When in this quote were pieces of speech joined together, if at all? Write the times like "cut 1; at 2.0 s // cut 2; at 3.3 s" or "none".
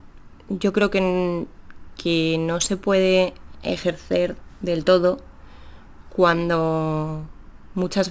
none